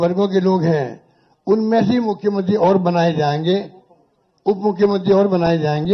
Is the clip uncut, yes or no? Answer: yes